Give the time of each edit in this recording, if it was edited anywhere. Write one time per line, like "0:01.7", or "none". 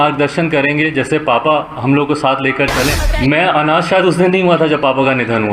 0:03.1